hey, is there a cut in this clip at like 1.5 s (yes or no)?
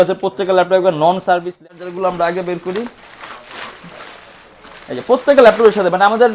yes